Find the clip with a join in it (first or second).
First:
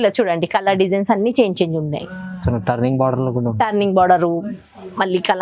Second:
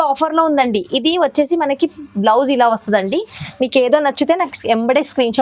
second